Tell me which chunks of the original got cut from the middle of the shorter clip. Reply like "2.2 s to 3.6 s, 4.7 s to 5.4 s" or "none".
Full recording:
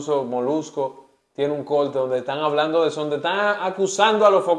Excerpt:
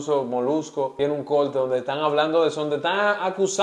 0.9 s to 1.3 s